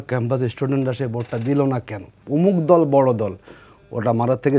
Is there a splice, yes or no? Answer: yes